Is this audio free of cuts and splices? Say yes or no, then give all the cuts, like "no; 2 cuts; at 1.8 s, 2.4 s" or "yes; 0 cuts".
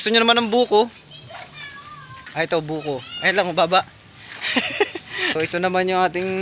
no; 1 cut; at 5.4 s